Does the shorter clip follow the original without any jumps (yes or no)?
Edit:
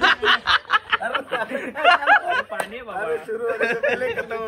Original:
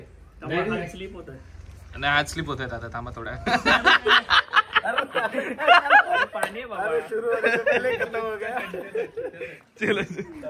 yes